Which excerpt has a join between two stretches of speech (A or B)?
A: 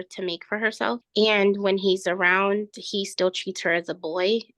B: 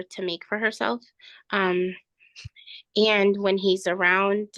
A